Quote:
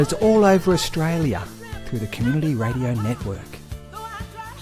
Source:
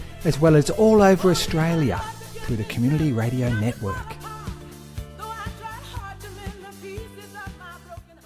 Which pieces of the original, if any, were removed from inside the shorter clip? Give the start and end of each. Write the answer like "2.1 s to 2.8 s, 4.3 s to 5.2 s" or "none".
3.9 s to 4.6 s